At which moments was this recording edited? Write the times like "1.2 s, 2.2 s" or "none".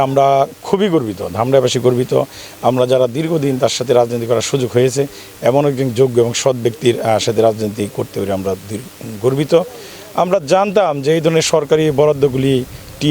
none